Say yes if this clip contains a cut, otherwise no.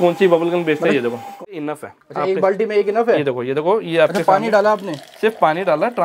yes